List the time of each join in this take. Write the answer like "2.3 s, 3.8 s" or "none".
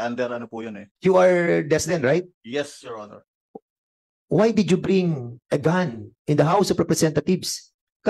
none